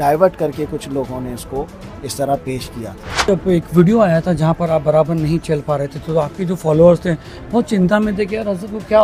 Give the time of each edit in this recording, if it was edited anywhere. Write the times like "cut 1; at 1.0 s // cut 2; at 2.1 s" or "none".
cut 1; at 3.3 s